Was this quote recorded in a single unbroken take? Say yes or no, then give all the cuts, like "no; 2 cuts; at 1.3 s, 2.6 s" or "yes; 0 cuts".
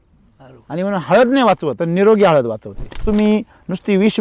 no; 2 cuts; at 1.8 s, 3.0 s